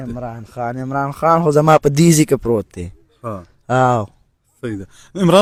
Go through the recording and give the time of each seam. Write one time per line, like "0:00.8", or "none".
none